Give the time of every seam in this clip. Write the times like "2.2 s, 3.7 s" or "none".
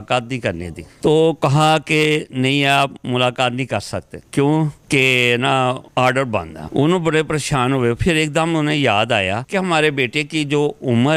none